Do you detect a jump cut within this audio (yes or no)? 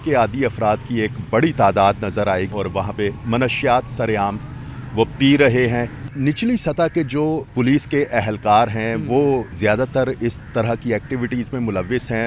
yes